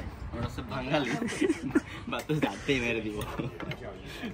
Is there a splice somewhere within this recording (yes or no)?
no